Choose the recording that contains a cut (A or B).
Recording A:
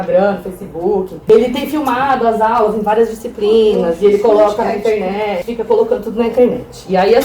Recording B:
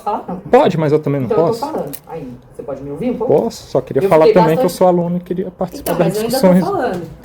A